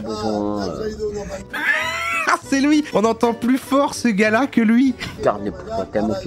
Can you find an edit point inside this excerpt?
yes; 1 cut; at 2.9 s

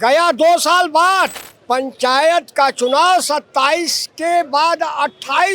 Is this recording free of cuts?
no; 1 cut; at 1.5 s

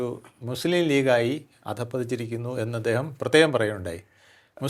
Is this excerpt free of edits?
yes; 0 cuts

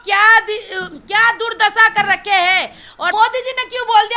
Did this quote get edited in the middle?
yes; 1 cut; at 3.0 s

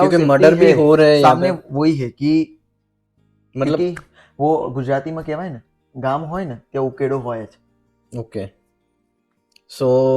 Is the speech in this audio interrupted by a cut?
no; 0 cuts

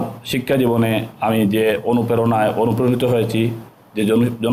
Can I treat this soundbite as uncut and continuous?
yes; 0 cuts

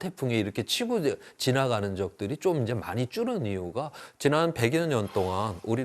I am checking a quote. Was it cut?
yes; 1 cut; at 4.0 s

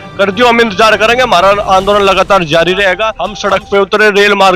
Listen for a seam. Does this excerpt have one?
yes; 1 cut; at 3.3 s

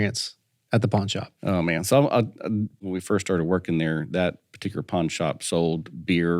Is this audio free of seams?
no; 1 cut; at 2.8 s

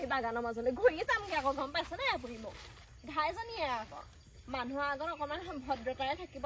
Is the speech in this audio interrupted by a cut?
no; 0 cuts

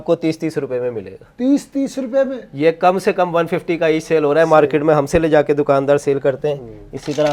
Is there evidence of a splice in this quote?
no; 0 cuts

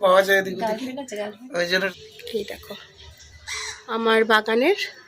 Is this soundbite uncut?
no; 1 cut; at 2.0 s

